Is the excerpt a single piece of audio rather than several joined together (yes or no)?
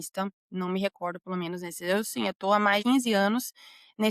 no